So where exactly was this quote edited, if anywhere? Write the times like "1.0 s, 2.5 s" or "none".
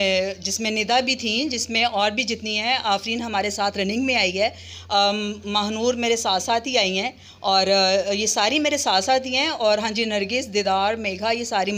none